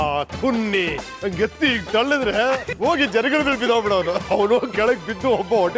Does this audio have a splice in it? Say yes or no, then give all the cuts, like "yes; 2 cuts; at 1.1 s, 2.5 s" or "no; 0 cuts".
no; 0 cuts